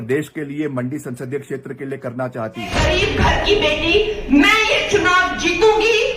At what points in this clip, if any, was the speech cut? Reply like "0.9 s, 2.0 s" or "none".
2.7 s